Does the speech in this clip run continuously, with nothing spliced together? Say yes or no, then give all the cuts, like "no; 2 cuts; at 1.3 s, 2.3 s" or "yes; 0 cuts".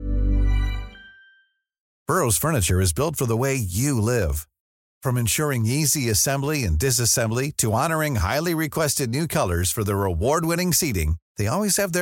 no; 1 cut; at 1.9 s